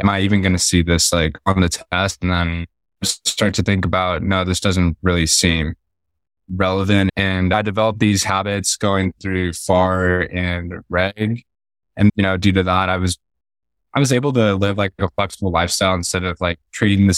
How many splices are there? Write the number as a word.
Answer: two